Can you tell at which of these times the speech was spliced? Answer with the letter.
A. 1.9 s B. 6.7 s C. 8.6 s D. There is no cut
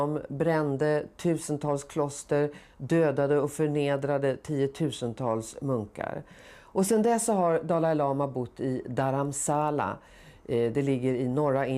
B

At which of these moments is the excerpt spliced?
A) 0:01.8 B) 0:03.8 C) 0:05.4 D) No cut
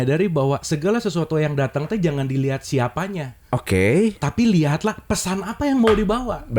D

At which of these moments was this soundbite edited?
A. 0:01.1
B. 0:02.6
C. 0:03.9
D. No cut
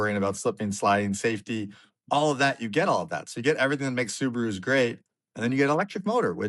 D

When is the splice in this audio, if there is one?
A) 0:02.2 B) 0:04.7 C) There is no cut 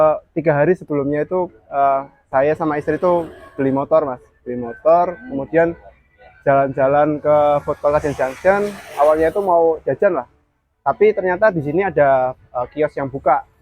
C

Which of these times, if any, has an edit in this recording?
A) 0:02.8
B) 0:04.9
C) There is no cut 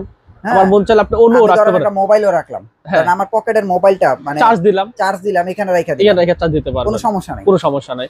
C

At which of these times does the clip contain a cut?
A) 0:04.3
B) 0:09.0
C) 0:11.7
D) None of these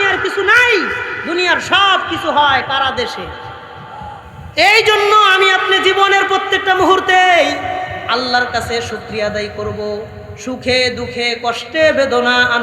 A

